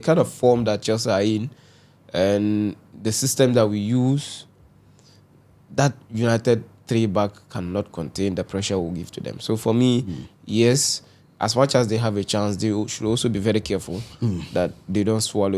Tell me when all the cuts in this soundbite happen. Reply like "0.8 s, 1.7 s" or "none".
none